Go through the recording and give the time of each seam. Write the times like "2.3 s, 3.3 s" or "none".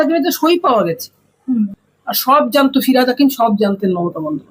1.9 s